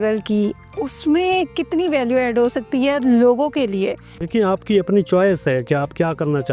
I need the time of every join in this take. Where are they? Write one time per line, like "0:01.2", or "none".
0:04.2